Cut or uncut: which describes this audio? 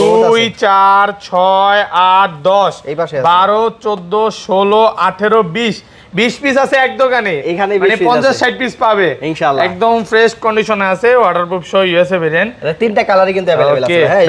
uncut